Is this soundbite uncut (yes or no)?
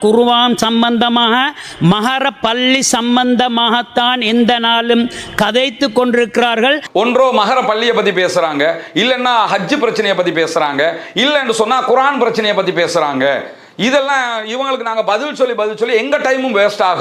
yes